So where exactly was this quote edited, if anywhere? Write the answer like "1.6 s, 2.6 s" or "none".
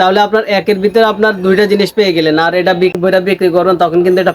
3.0 s